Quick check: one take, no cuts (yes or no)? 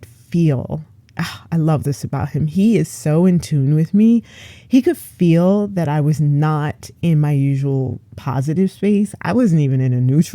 yes